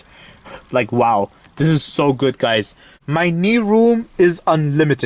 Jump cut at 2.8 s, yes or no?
yes